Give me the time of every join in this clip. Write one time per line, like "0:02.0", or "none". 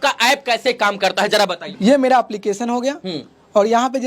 0:01.6

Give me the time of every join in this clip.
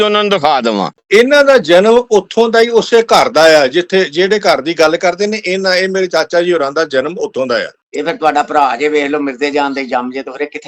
0:00.9
0:07.8

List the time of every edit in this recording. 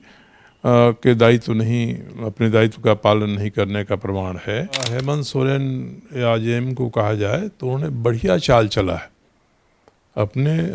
0:04.9

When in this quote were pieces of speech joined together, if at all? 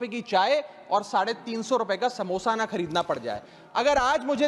0:03.6

